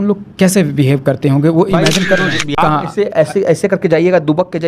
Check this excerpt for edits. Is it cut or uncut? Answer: cut